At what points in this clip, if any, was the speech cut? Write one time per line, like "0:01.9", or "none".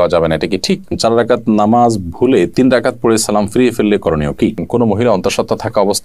0:00.9
0:04.6